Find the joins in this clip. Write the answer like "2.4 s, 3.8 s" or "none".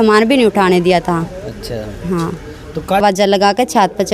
3.0 s